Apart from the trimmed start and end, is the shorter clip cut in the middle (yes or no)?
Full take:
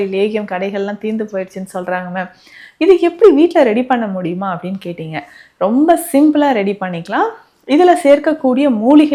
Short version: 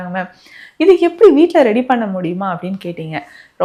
no